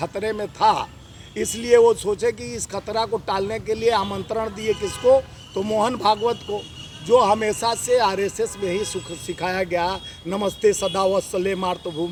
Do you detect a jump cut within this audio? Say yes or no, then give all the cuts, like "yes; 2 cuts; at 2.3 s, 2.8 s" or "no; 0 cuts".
no; 0 cuts